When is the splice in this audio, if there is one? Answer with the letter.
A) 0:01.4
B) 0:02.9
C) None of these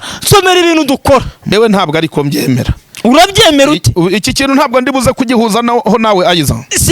A